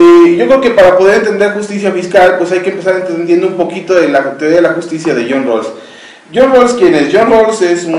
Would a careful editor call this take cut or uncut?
uncut